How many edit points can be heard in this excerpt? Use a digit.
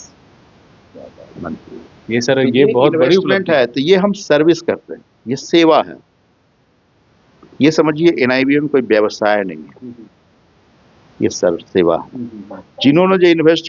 0